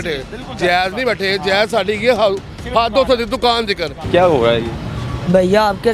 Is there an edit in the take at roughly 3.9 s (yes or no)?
yes